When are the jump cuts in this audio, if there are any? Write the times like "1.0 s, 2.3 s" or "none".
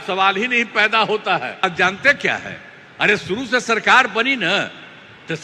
1.6 s